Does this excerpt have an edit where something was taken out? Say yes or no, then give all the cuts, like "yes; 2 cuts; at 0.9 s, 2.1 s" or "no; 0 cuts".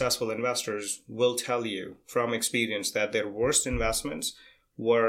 no; 0 cuts